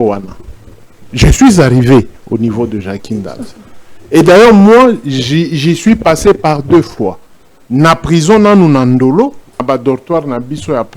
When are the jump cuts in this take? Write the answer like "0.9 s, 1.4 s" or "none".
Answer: 9.6 s

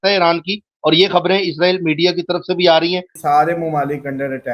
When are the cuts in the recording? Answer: 3.1 s

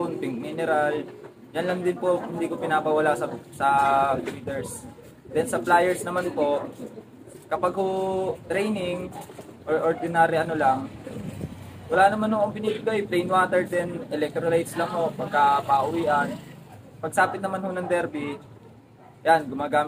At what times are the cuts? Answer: none

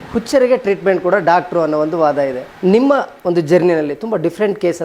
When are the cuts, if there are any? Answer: 2.5 s, 3.1 s

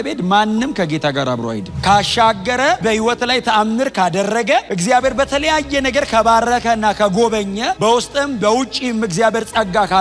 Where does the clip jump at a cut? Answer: 1.7 s

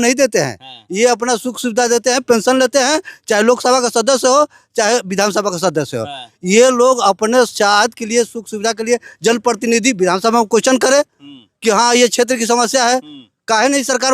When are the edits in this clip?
none

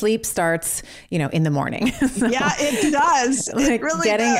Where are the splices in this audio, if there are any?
none

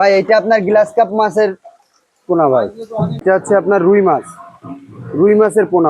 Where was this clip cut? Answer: 3.1 s

